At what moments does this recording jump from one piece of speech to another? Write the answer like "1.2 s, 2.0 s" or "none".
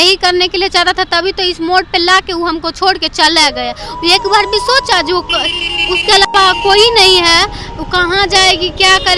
none